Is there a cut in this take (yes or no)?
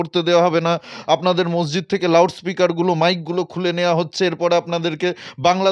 no